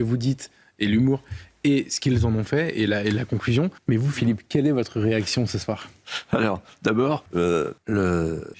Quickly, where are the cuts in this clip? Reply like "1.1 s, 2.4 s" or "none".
7.6 s

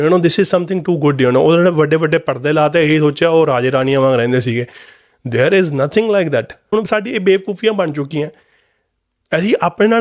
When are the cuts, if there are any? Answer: none

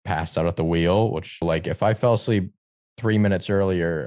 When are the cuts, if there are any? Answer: 1.4 s

